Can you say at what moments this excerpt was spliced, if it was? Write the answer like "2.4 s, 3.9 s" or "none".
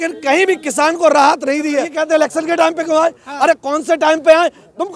1.9 s